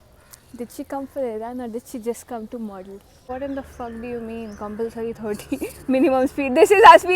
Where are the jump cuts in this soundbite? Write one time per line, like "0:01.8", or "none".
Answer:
0:03.1